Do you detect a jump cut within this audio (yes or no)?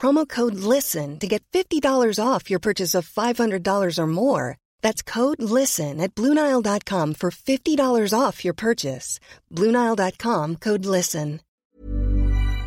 yes